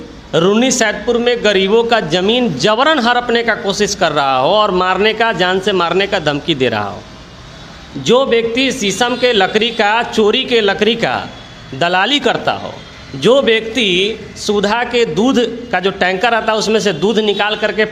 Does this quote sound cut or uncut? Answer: uncut